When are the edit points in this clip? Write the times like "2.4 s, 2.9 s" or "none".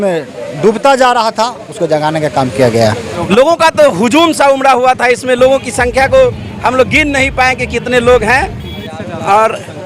3.1 s